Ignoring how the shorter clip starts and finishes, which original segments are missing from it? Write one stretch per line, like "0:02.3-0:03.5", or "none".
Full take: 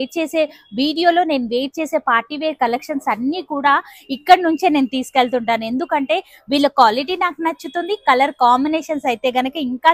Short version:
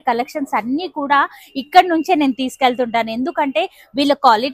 none

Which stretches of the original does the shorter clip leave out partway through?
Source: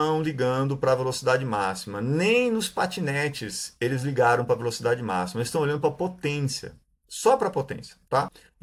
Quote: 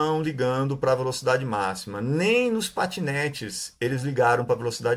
none

